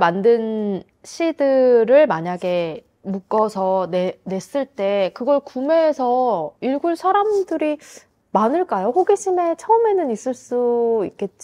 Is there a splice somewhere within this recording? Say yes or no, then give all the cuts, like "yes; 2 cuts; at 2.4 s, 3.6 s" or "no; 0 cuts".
no; 0 cuts